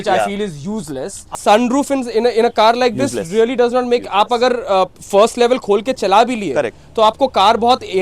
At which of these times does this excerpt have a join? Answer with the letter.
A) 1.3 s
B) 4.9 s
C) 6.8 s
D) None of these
A